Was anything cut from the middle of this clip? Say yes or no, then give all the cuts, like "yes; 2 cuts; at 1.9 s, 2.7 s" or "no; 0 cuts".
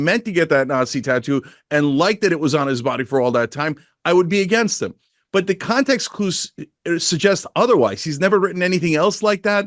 no; 0 cuts